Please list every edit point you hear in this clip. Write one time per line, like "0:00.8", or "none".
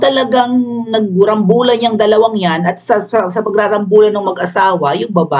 none